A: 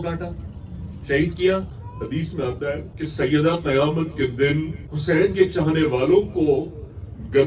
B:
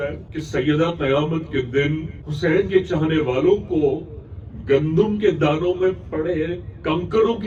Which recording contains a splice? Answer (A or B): A